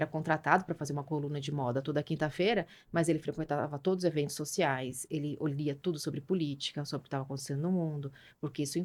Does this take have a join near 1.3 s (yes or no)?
no